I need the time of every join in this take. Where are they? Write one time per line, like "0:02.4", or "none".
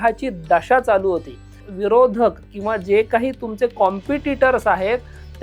0:01.7